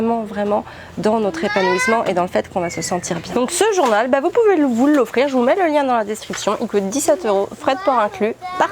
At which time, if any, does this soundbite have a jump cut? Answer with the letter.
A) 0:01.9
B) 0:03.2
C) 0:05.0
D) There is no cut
D